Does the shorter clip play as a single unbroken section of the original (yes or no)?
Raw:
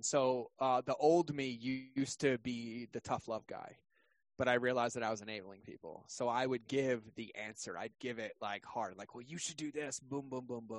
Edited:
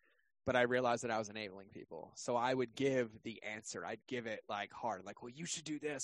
yes